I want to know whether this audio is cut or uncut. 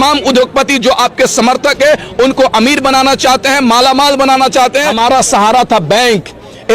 cut